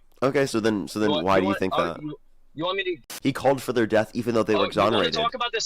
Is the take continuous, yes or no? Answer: no